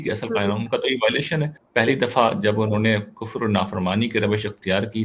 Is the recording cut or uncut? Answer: cut